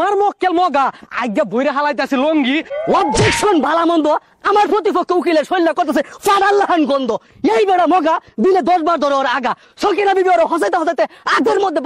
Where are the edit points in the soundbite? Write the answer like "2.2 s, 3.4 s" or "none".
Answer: 2.7 s